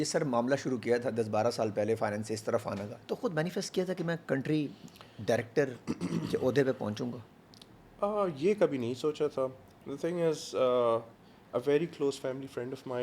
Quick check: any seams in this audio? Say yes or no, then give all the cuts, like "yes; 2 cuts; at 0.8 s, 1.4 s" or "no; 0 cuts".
no; 0 cuts